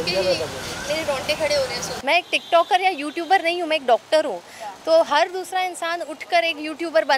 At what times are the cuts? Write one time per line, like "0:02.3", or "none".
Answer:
0:01.9